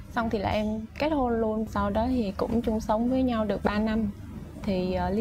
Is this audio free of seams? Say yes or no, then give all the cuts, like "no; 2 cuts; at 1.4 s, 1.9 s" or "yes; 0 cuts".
no; 1 cut; at 1.6 s